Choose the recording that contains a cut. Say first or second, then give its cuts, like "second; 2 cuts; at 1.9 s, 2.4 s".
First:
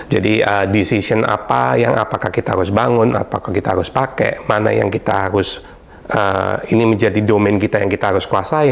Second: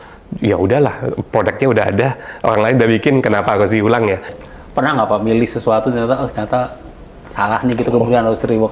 second; 1 cut; at 4.4 s